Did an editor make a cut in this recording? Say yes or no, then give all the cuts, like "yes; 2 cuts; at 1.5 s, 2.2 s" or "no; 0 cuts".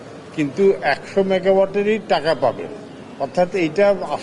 no; 0 cuts